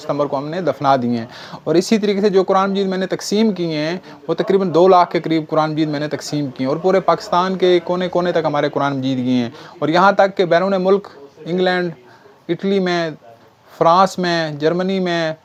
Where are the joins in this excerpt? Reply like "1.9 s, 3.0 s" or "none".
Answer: none